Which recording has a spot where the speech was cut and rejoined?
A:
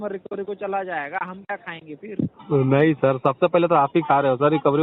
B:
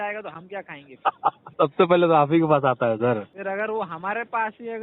B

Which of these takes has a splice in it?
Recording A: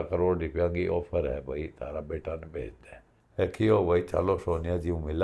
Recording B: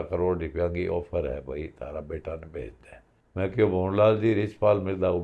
A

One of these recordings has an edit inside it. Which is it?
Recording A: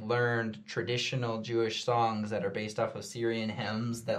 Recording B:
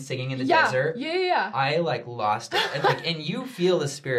B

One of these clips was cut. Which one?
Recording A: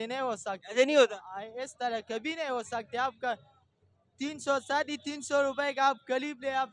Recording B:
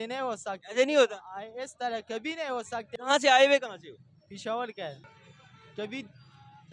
B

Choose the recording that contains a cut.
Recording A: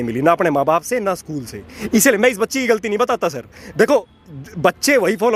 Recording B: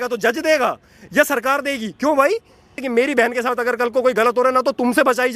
B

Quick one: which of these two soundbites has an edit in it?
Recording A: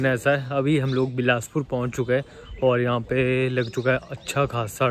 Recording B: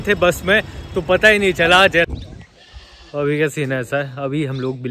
B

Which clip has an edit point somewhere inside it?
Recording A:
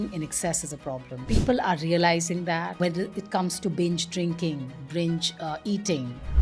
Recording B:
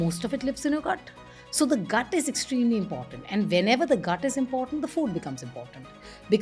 A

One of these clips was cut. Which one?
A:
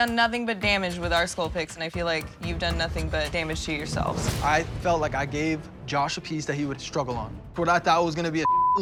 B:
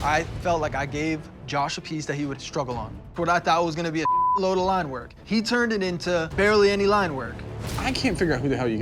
B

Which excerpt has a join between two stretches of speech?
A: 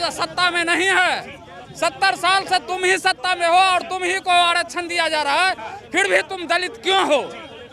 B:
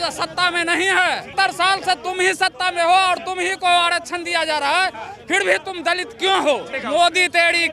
B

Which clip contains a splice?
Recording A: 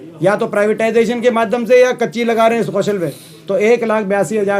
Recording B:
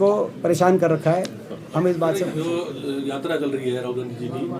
B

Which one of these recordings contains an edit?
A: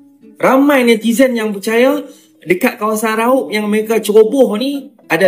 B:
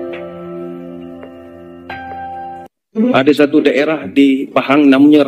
B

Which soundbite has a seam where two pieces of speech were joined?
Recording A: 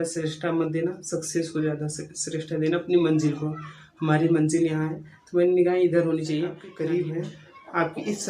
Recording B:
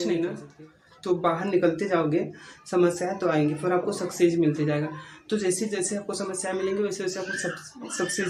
A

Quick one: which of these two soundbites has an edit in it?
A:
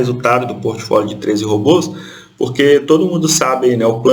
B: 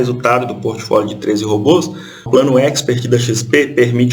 B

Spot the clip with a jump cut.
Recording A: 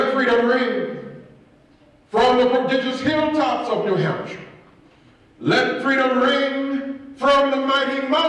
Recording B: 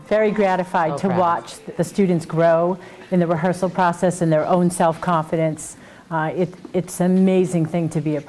B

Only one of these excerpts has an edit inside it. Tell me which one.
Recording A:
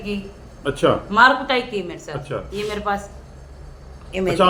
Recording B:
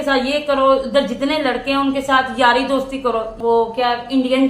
B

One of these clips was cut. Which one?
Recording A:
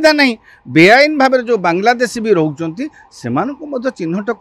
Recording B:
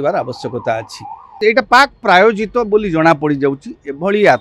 B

